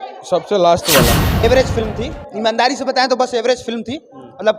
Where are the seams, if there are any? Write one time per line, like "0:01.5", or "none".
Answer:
0:01.4